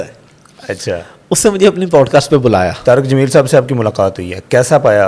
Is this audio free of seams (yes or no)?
no